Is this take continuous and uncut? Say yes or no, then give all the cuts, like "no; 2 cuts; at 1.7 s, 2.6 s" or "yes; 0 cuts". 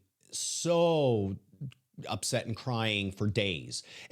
yes; 0 cuts